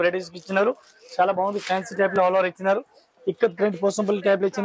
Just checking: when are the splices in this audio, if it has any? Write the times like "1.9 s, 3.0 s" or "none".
none

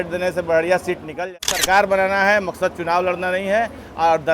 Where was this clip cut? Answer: 1.2 s

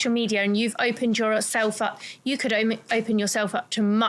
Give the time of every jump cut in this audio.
none

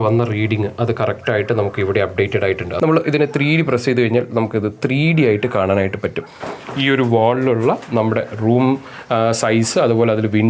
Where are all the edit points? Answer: 2.7 s, 6.3 s

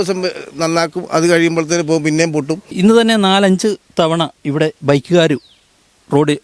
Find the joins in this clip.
2.7 s

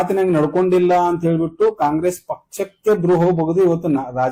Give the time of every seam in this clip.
none

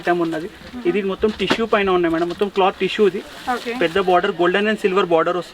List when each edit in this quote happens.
none

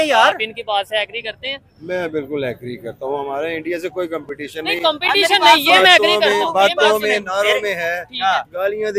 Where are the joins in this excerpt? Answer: none

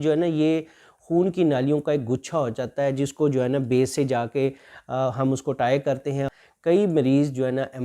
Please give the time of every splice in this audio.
6.3 s

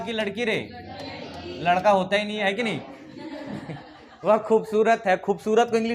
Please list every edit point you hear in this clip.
none

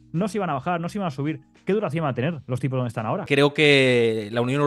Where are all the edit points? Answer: 3.3 s

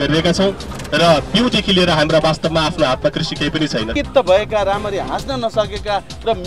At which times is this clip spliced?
3.9 s

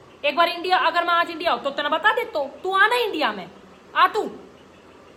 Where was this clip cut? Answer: none

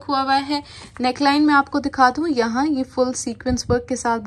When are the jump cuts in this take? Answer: none

